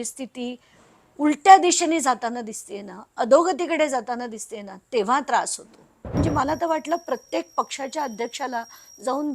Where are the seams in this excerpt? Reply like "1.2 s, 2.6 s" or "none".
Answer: 6.1 s